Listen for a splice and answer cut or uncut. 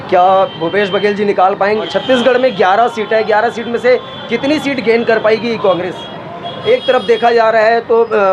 cut